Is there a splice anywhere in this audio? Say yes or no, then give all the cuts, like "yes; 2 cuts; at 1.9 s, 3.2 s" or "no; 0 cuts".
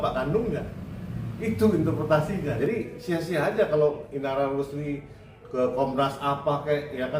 yes; 1 cut; at 2.5 s